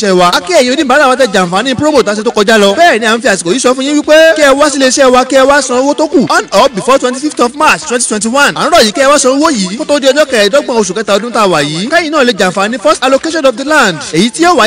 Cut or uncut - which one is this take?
uncut